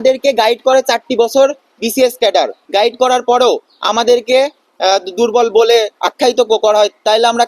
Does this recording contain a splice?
yes; 1 cut; at 2.6 s

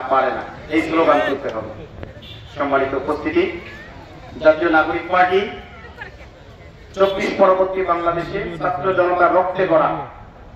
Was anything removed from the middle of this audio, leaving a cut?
no; 0 cuts

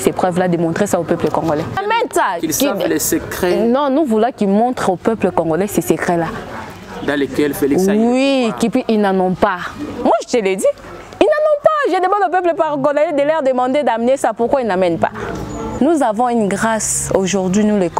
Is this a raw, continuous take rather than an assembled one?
no; 2 cuts; at 1.8 s, 15.6 s

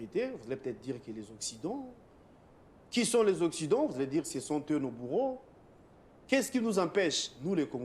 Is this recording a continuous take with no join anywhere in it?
yes; 0 cuts

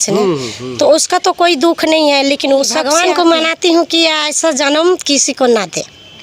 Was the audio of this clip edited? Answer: yes; 1 cut; at 2.8 s

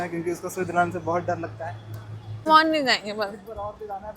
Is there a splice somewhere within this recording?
yes; 1 cut; at 2.5 s

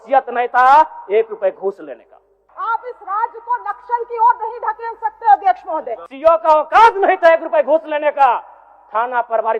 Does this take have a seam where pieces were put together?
yes; 2 cuts; at 2.4 s, 6.0 s

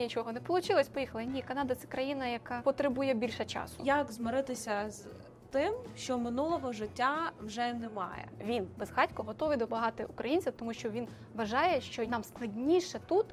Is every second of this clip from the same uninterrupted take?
no; 4 cuts; at 2.5 s, 3.8 s, 8.4 s, 12.1 s

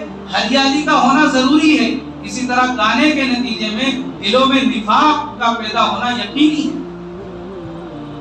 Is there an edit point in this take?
yes; 1 cut; at 6.8 s

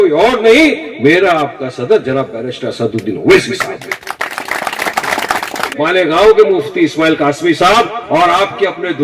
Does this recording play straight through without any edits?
no; 1 cut; at 5.6 s

